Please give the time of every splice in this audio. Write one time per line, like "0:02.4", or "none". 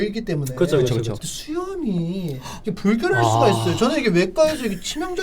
0:01.2